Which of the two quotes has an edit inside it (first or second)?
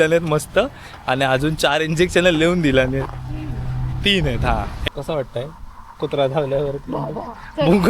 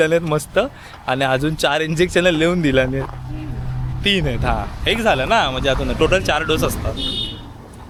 first